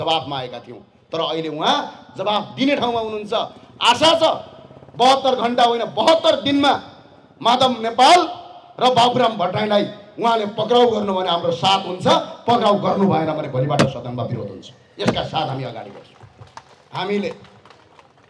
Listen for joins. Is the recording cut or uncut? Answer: uncut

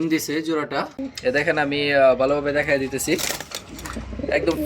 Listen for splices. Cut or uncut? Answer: cut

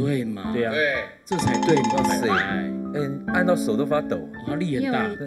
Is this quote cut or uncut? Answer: uncut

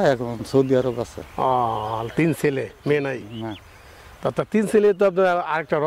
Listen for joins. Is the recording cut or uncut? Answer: uncut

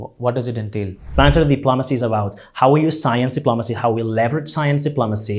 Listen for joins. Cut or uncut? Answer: cut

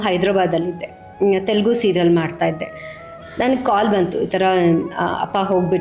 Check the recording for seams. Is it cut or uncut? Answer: uncut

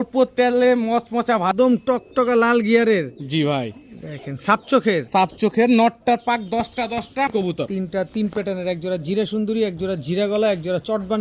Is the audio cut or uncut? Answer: cut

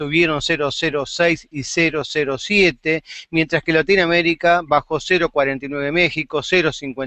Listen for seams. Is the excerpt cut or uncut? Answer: cut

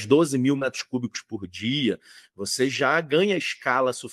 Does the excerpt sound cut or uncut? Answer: uncut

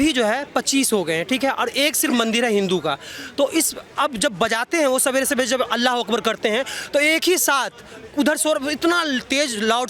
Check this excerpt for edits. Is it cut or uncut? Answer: uncut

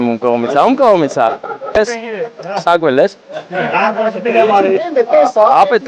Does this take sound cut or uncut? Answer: cut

